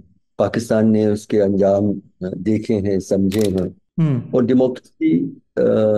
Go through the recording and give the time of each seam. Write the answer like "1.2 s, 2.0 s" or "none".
3.8 s